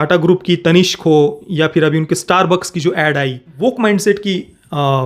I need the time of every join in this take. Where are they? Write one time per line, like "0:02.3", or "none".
0:03.5